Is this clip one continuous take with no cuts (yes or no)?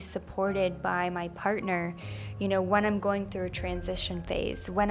yes